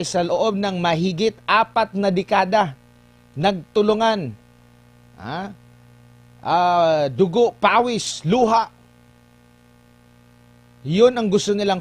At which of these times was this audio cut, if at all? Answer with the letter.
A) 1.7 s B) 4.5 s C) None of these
C